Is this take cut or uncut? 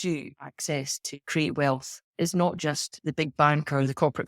cut